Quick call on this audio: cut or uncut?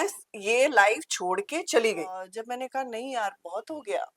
cut